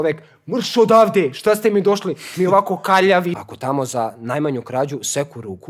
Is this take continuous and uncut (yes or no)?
no